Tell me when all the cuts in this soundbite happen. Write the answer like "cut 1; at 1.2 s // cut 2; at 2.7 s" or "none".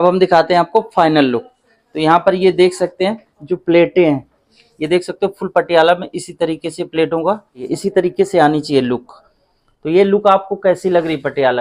cut 1; at 7.7 s